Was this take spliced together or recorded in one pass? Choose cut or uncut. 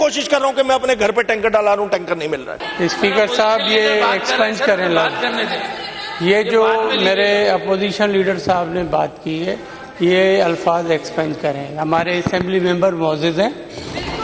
cut